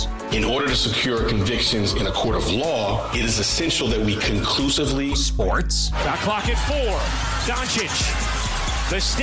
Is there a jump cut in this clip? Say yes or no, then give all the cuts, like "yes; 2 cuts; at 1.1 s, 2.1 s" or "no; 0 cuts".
no; 0 cuts